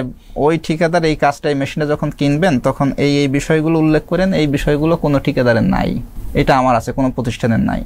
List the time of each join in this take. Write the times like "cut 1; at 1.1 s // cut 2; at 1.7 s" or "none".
none